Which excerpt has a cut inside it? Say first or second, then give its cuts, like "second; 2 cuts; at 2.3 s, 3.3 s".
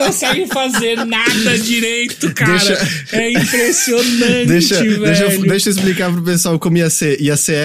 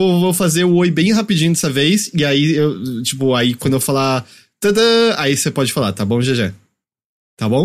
second; 1 cut; at 6.7 s